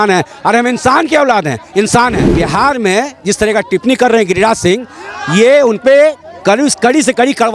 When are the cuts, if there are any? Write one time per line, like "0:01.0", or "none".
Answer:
0:02.4